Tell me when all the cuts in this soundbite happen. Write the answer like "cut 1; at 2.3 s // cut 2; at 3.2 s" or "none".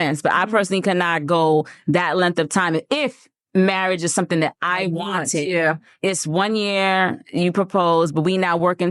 cut 1; at 7.2 s